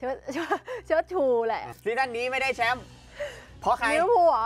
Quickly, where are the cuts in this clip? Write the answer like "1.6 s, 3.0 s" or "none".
1.7 s